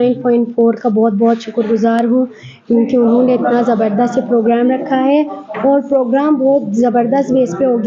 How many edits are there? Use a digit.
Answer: 0